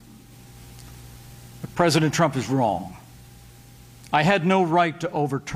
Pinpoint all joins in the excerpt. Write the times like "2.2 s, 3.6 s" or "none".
none